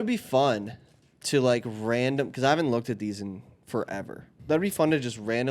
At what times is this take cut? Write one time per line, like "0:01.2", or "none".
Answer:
0:04.2